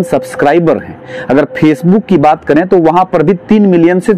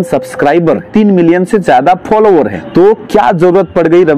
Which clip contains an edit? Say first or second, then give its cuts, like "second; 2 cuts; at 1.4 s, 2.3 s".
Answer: second; 2 cuts; at 0.9 s, 2.6 s